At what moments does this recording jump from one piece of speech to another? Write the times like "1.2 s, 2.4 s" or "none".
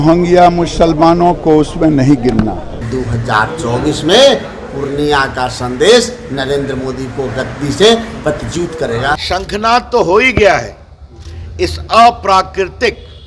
2.9 s, 9.2 s